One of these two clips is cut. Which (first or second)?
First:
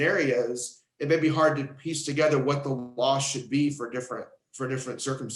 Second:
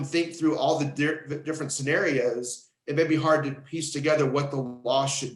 first